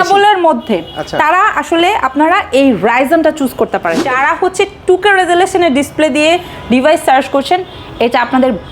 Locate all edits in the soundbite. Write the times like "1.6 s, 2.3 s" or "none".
4.0 s